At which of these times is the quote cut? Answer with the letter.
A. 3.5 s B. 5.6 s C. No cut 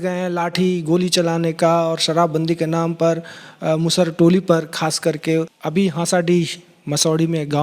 B